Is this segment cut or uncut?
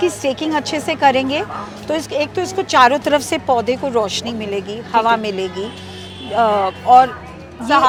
uncut